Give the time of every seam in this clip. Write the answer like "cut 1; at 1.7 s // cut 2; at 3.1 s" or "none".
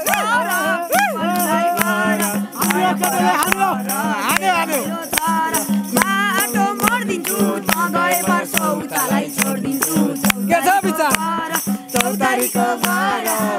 none